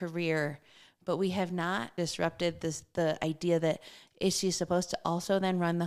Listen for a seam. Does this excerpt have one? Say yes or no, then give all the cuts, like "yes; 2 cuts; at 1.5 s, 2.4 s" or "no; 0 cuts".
yes; 1 cut; at 1.9 s